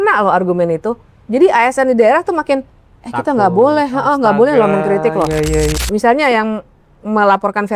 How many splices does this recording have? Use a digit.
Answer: 1